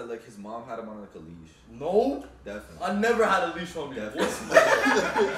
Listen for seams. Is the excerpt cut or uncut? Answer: uncut